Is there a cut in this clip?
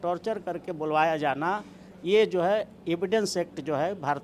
no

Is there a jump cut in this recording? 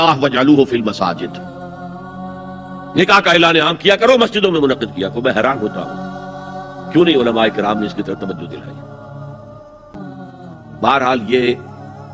yes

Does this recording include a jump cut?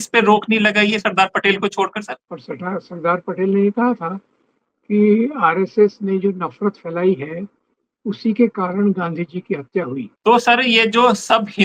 yes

